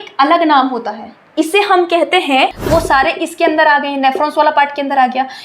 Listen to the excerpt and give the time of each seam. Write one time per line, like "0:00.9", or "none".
0:02.6